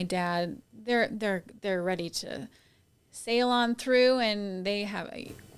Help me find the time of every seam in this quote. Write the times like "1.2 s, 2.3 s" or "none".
none